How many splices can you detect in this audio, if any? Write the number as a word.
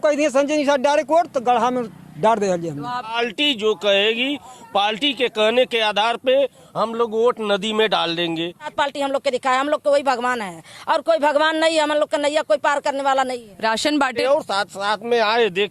three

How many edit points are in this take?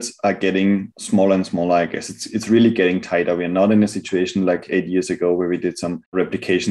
one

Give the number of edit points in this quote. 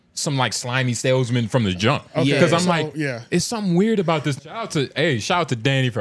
one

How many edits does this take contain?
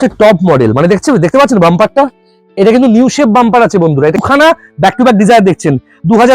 one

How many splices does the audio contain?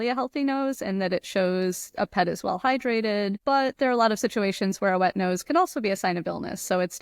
one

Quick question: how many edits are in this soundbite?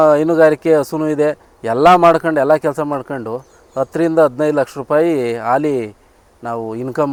zero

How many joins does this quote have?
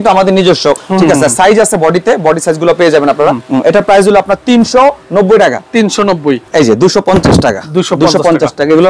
three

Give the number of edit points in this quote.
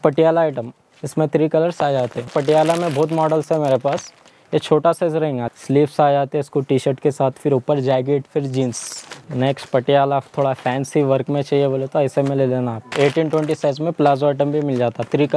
four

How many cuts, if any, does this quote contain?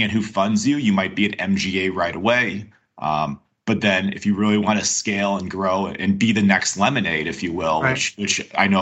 zero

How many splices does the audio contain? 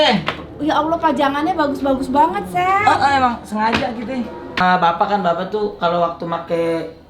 one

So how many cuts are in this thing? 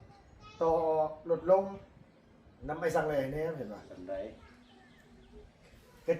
one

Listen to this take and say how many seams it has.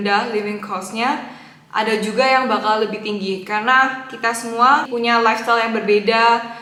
zero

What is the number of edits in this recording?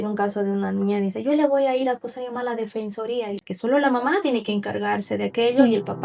one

